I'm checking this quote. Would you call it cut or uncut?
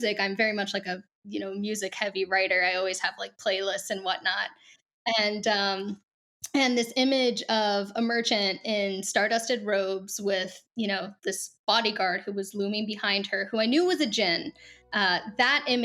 uncut